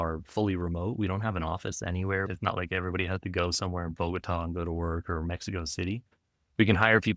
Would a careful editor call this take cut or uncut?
uncut